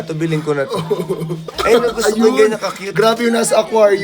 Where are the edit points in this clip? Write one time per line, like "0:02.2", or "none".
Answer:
0:01.4